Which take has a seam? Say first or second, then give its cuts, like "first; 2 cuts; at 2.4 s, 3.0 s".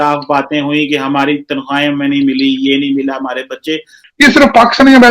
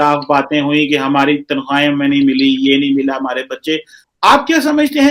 first; 1 cut; at 4.0 s